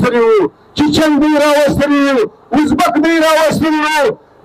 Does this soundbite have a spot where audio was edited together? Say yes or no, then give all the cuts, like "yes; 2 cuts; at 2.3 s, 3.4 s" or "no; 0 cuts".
no; 0 cuts